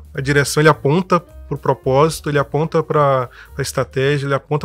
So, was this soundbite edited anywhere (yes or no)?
no